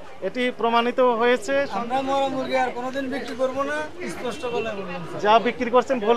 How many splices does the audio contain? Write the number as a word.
one